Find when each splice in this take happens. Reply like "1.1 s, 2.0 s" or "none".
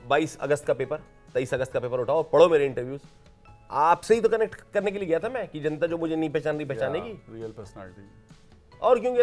none